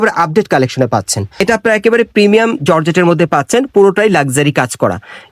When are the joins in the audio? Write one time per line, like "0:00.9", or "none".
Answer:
0:01.4